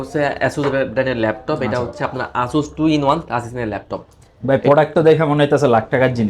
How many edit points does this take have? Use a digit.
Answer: 0